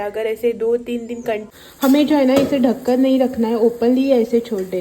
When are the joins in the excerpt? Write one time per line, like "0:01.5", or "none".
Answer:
0:01.5